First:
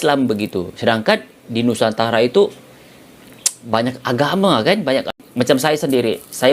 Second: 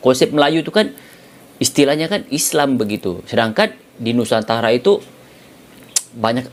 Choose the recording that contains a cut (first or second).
first